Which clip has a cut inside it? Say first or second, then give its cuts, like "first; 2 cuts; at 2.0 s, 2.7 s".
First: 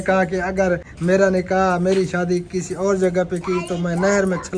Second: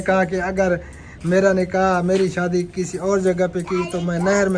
first; 1 cut; at 0.9 s